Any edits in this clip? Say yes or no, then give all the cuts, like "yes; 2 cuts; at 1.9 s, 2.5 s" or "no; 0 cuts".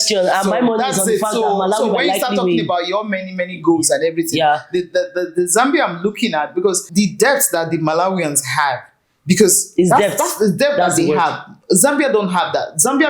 yes; 1 cut; at 6.8 s